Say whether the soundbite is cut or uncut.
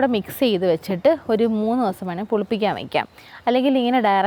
uncut